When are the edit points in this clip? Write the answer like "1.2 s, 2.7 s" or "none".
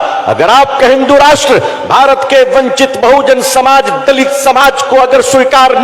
none